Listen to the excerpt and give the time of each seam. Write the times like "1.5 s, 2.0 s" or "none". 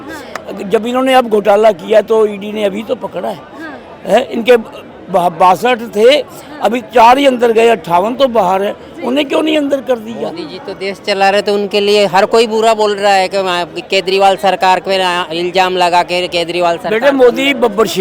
none